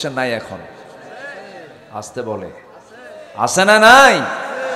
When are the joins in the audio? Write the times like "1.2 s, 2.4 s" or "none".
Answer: none